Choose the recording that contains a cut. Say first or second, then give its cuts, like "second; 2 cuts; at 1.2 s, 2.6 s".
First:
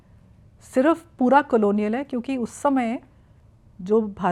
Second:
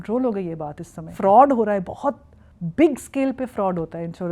second; 1 cut; at 1.0 s